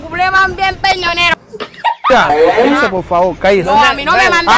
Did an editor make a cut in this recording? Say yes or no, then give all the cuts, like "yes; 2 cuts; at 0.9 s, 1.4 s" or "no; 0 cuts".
yes; 1 cut; at 2.1 s